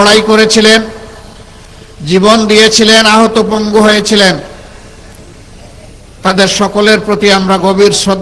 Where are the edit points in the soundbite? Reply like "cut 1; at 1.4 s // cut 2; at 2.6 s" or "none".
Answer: none